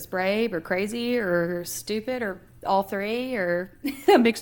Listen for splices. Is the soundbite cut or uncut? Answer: uncut